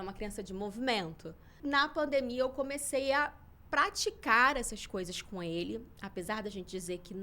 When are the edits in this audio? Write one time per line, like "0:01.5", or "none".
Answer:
0:01.6